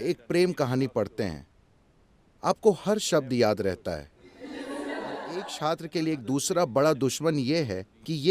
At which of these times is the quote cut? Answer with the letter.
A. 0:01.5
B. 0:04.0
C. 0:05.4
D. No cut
C